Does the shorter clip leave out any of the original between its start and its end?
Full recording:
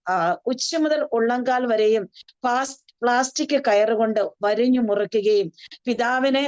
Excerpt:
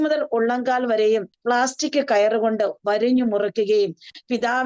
yes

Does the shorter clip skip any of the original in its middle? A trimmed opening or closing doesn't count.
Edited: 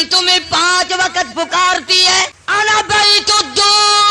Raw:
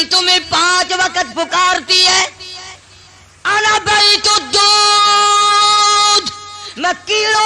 yes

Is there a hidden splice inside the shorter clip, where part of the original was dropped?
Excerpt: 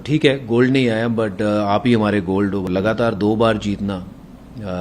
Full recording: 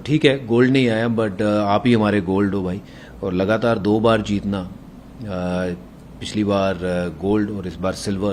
yes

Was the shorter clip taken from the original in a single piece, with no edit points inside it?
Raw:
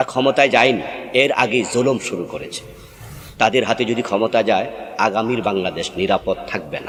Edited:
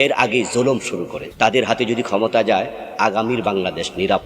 no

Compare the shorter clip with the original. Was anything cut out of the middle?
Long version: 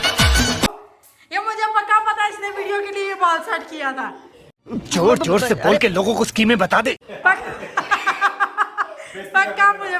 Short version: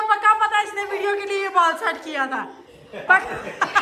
yes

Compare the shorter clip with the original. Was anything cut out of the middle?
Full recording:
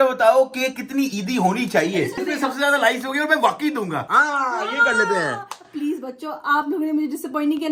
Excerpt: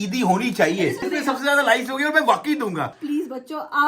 yes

